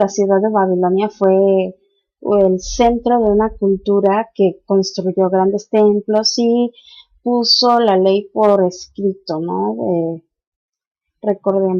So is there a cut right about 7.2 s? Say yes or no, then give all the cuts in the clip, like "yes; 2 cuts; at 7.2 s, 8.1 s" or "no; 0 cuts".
no; 1 cut; at 8.5 s